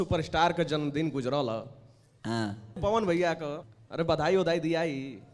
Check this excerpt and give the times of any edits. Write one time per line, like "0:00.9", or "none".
0:02.8
0:03.6